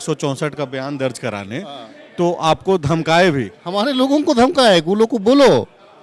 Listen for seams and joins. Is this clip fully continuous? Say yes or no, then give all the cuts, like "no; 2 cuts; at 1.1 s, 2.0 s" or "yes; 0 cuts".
yes; 0 cuts